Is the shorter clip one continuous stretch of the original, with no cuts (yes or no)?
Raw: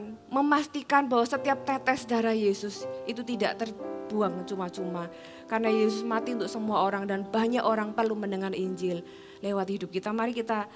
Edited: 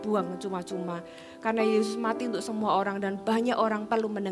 yes